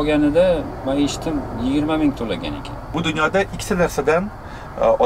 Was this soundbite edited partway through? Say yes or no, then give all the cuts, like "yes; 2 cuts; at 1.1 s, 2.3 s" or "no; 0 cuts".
yes; 1 cut; at 2.9 s